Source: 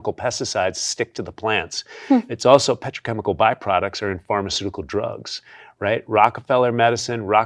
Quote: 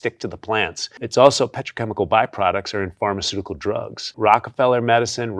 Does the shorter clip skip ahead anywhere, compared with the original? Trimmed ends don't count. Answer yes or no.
yes